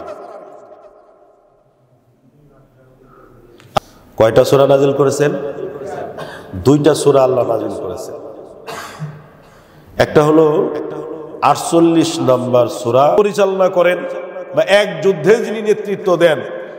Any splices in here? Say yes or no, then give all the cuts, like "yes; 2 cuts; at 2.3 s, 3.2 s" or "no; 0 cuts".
yes; 2 cuts; at 3.8 s, 13.2 s